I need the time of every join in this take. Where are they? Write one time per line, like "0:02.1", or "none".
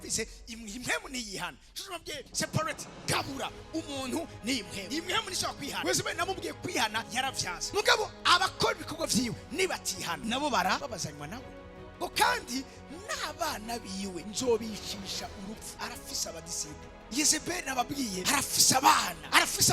0:12.0